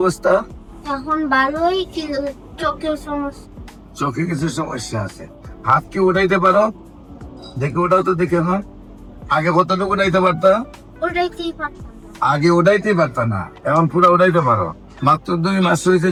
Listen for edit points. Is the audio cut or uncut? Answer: uncut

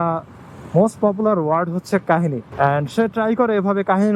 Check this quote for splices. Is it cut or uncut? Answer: cut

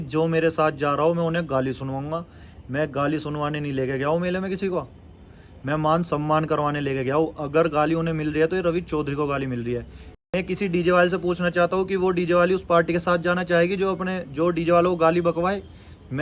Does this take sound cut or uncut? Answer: uncut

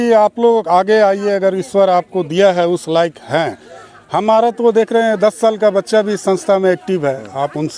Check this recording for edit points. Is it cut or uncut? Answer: uncut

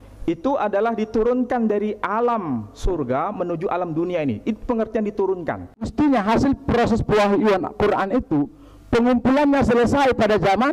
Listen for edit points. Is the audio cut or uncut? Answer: cut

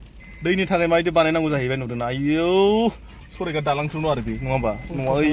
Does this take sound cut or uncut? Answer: uncut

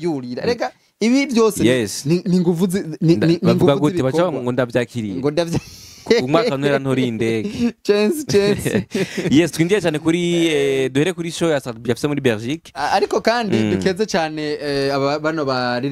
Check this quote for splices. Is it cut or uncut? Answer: uncut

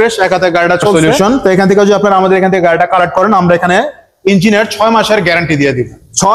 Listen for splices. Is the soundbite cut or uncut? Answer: cut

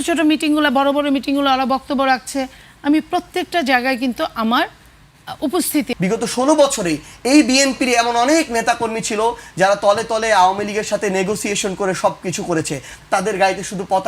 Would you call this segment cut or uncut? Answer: cut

